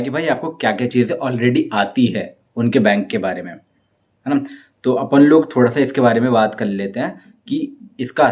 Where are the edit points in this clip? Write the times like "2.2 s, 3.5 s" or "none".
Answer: none